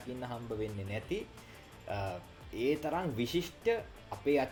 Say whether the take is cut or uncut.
uncut